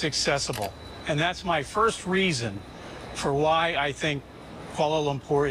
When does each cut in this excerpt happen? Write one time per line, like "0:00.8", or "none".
none